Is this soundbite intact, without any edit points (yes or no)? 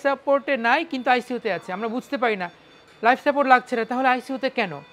yes